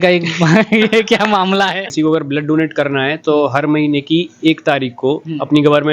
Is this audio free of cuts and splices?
no; 1 cut; at 1.8 s

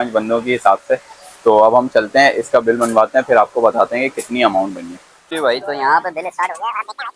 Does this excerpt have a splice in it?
no; 0 cuts

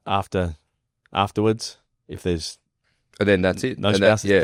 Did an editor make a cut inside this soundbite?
no; 0 cuts

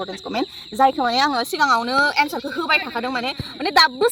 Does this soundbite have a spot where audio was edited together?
no; 0 cuts

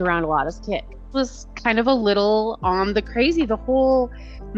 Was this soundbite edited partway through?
yes; 1 cut; at 1.0 s

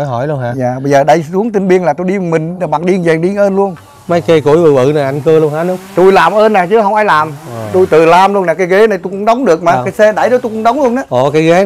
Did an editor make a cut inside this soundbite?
yes; 1 cut; at 3.9 s

